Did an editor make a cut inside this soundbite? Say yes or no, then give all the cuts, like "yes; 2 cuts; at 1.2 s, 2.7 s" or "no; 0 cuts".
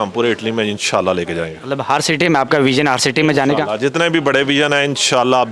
no; 0 cuts